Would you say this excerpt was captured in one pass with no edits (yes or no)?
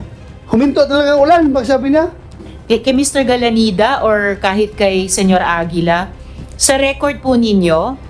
no